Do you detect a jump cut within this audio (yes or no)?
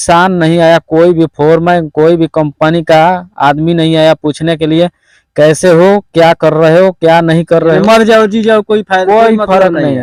no